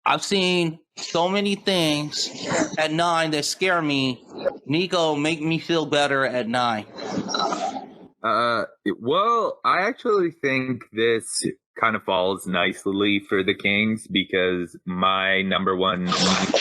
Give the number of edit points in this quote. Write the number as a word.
one